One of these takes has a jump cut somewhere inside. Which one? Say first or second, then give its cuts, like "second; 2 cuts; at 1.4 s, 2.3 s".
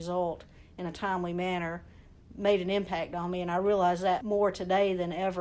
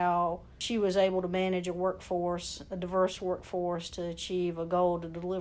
first; 1 cut; at 4.2 s